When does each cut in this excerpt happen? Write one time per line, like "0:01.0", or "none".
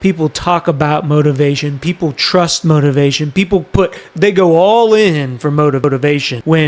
none

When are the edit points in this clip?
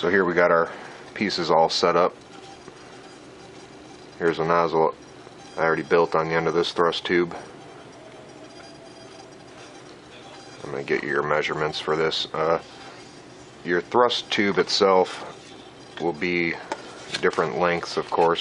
none

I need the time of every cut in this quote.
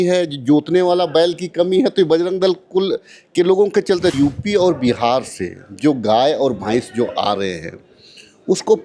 0:04.1

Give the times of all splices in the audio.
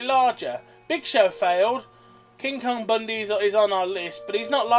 0:02.4

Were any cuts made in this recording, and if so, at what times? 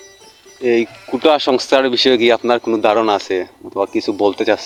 none

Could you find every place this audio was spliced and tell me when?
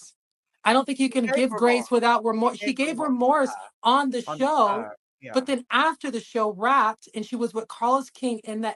none

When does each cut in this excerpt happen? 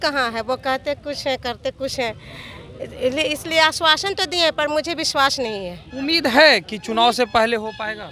none

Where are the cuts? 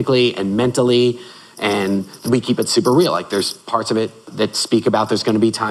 0:02.2
0:04.2

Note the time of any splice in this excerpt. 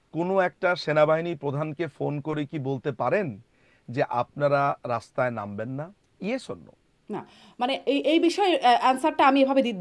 0:06.0

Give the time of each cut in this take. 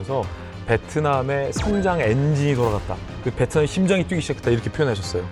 none

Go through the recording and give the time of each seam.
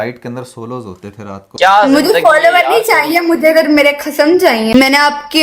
0:01.5
0:04.7

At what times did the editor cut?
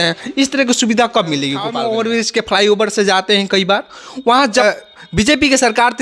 0:01.7
0:04.6

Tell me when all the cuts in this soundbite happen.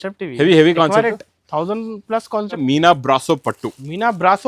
0:02.6

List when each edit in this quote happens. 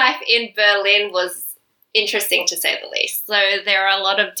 none

